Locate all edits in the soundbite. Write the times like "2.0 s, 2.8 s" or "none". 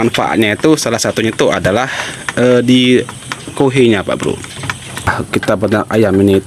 5.1 s